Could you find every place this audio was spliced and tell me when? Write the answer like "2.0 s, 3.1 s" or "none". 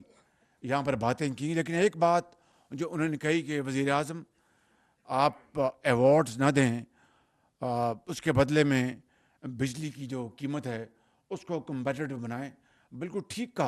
none

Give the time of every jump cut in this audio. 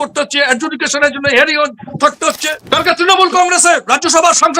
2.6 s

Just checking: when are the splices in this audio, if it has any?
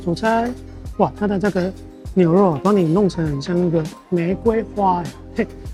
none

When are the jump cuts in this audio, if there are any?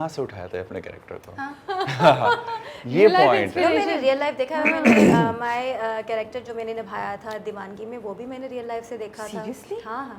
none

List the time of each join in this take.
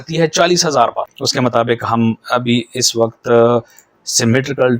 1.2 s

